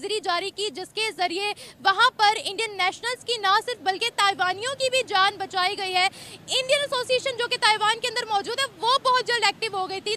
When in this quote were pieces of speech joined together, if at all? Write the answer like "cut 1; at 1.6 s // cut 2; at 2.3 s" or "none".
none